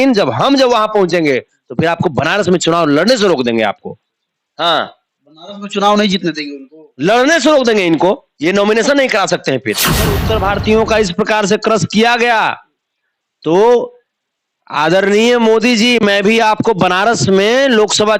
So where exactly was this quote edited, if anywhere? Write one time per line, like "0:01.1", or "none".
0:10.2